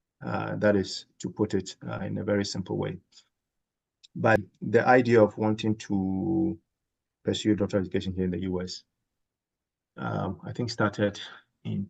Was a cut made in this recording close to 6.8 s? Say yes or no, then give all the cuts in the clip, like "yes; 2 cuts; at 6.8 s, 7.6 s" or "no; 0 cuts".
no; 1 cut; at 4.4 s